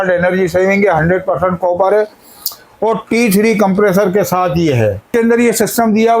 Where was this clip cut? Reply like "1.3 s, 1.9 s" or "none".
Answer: 5.1 s